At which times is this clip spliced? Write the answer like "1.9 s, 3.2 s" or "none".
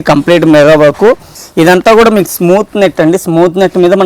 1.4 s